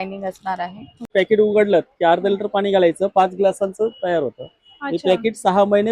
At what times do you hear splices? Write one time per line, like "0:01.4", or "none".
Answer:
0:01.1